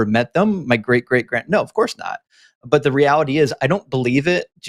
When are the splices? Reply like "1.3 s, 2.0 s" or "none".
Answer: none